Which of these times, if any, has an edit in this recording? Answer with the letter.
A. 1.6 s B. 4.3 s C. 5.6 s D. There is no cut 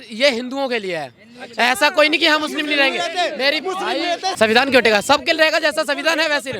B